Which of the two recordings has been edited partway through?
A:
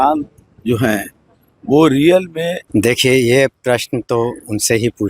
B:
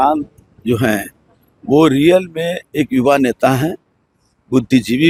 A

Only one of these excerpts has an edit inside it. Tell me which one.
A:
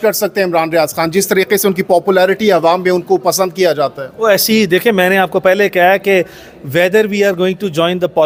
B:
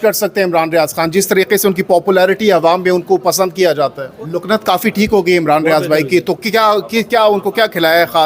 B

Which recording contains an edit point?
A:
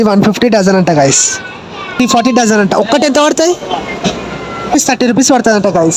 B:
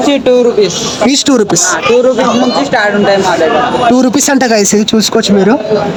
A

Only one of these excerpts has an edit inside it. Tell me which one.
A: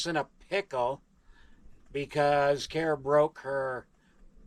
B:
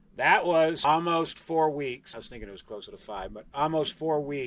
B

